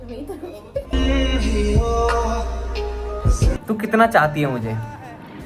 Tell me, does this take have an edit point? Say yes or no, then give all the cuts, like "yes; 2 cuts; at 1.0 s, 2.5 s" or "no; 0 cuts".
yes; 1 cut; at 3.6 s